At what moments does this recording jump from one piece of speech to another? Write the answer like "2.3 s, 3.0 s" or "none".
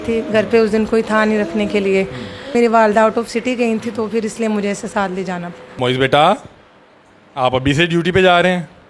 2.5 s, 5.8 s